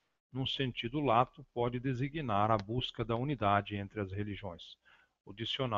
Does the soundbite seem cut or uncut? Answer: cut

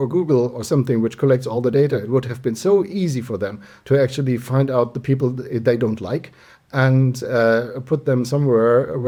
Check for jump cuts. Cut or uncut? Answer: uncut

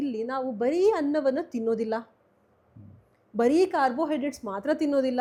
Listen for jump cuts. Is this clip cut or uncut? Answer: uncut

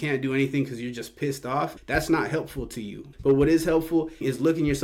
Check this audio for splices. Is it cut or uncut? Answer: uncut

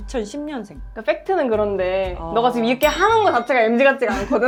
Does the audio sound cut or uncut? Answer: uncut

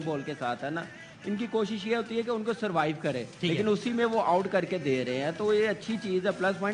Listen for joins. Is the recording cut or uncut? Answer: uncut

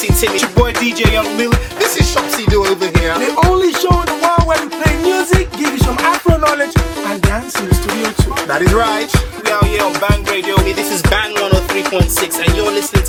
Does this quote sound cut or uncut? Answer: uncut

